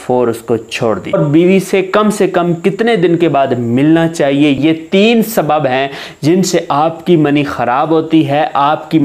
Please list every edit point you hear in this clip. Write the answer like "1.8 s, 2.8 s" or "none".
1.1 s, 4.6 s

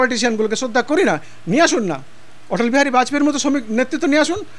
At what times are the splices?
1.3 s

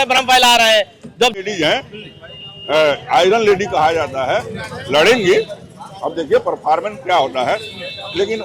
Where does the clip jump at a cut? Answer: 1.4 s

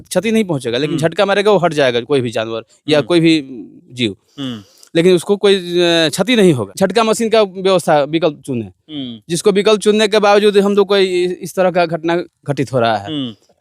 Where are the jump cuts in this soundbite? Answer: 6.7 s

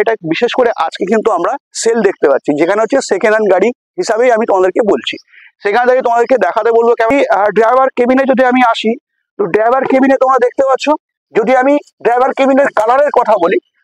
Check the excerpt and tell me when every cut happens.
7.1 s

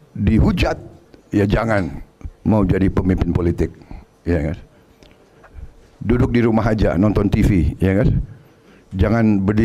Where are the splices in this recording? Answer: none

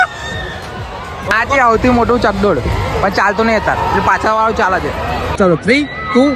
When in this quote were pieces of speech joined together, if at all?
1.2 s, 5.3 s

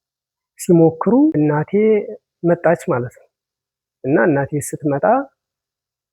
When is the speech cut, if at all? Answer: 1.4 s

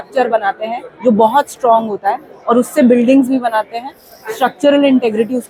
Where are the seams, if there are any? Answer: none

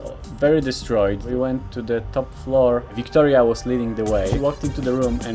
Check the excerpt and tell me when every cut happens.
1.2 s, 3.0 s, 4.4 s

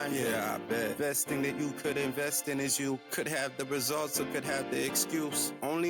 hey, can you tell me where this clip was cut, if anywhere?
none

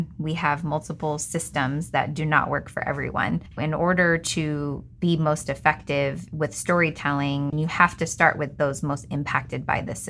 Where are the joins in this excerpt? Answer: 3.5 s, 7.5 s

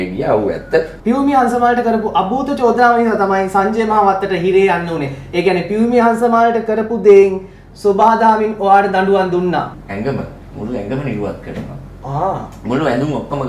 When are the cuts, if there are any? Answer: 0.9 s, 9.8 s

